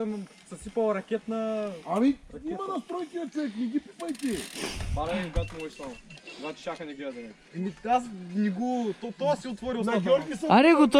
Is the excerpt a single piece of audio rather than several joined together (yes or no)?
yes